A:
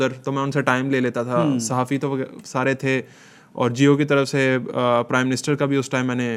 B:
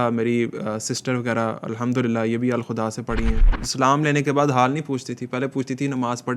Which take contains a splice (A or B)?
B